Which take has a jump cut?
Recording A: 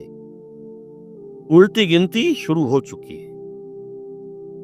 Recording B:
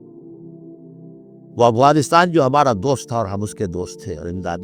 A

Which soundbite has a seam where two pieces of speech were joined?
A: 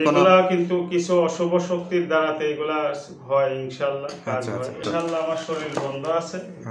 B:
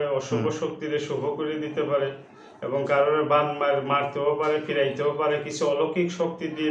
A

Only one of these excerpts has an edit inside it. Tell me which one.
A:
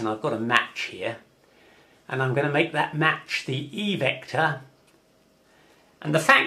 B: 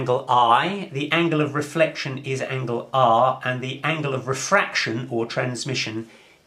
B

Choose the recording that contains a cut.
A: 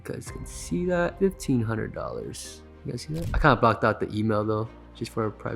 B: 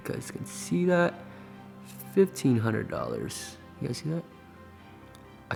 A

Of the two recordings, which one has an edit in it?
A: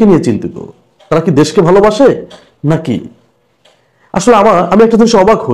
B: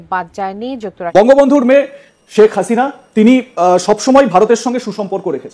B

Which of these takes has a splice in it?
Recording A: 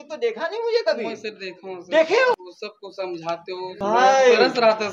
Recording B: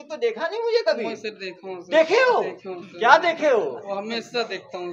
A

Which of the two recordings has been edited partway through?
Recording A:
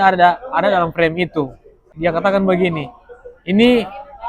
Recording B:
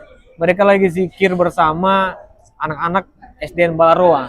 A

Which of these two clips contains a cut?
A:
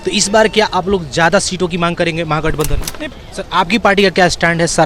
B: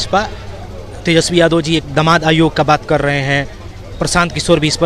A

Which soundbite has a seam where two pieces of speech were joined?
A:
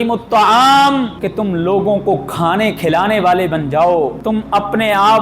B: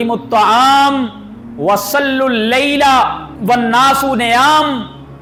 A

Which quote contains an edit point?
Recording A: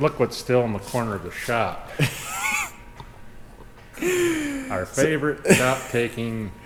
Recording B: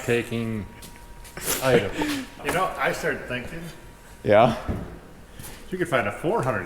B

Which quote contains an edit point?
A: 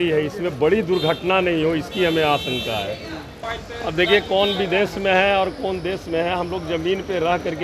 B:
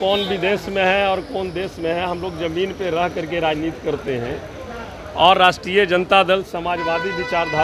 A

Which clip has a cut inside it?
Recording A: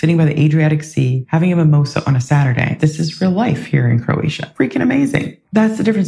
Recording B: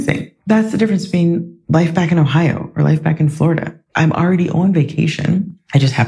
A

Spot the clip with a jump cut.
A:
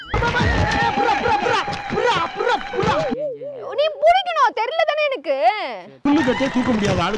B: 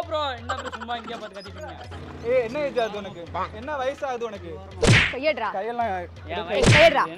B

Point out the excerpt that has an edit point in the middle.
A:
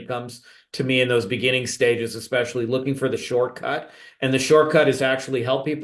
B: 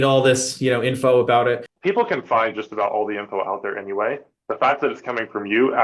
B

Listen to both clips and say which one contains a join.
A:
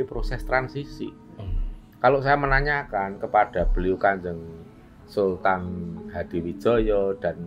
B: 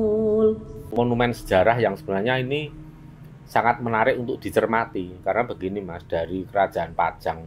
B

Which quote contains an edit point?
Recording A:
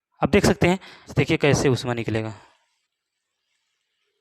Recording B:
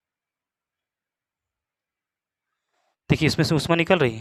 A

